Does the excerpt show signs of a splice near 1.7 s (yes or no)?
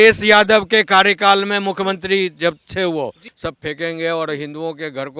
no